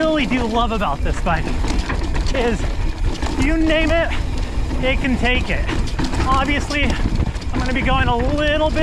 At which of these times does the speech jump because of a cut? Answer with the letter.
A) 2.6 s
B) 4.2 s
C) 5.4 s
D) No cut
D